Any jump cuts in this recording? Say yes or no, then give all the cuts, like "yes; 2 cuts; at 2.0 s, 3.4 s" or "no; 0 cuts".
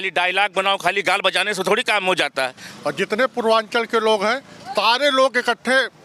yes; 1 cut; at 2.6 s